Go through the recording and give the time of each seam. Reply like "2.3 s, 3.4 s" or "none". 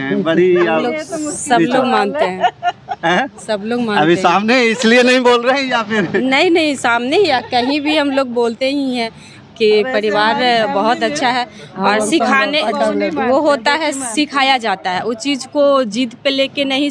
none